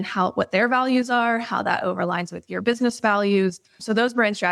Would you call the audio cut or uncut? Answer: uncut